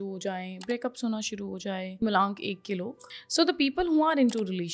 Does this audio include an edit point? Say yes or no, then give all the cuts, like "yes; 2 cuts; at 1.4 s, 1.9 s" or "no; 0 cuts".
yes; 2 cuts; at 2.0 s, 3.0 s